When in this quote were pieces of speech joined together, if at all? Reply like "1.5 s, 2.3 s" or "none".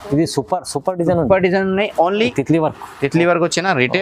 2.4 s